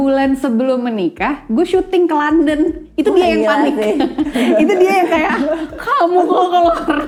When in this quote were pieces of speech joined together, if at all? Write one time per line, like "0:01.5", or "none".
none

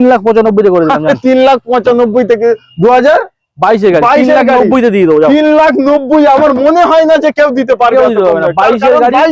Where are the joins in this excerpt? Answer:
none

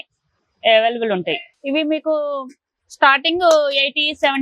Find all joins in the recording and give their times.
0:01.4

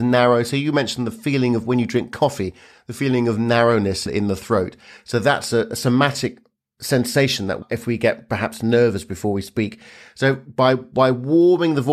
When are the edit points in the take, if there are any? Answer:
0:04.0
0:07.6

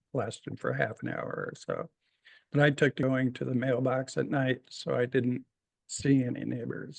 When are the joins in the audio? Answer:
0:03.0

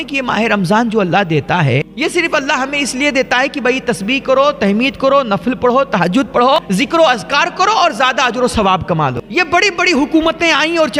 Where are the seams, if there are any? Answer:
0:01.9
0:06.6
0:09.2

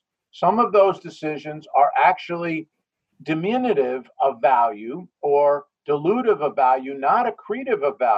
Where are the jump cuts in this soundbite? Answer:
0:03.1

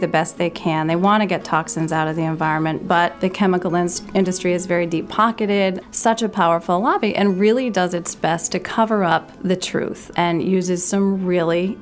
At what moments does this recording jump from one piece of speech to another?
0:03.1
0:05.8
0:09.9

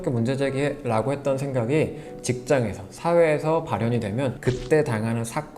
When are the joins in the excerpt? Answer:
none

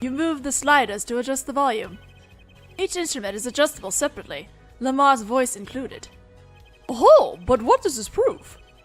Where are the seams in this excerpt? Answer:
none

